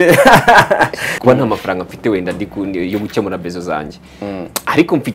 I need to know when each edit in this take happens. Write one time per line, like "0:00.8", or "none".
0:01.1